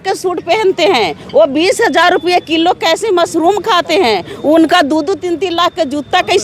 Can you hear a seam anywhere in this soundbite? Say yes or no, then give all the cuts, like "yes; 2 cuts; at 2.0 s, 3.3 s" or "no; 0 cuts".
no; 0 cuts